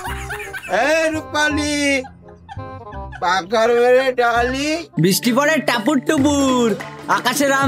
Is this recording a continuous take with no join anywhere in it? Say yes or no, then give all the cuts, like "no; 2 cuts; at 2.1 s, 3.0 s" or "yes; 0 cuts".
no; 1 cut; at 4.9 s